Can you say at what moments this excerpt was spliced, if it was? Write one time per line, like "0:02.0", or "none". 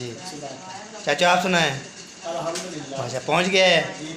none